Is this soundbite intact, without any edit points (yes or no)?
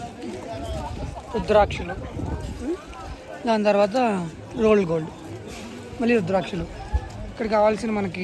yes